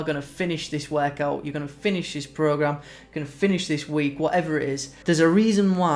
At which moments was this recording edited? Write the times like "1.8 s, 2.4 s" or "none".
4.9 s